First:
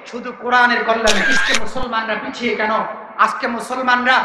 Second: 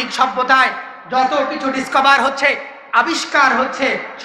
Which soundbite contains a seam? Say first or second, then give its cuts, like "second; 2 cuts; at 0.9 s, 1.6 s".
first; 1 cut; at 1.4 s